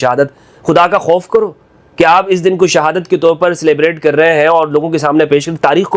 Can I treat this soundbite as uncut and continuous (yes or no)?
yes